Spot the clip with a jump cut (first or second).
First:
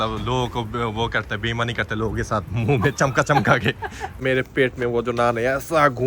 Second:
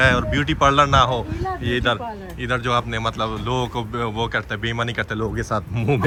first